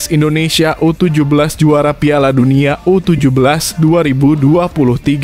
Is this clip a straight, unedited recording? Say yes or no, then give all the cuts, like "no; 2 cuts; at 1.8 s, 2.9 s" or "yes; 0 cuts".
yes; 0 cuts